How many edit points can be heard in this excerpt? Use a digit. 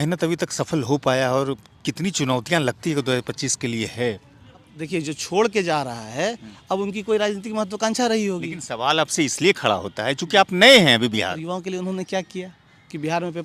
2